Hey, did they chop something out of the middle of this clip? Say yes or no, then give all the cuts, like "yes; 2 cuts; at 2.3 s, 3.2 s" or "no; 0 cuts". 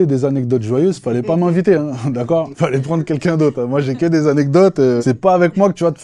yes; 2 cuts; at 2.5 s, 5.0 s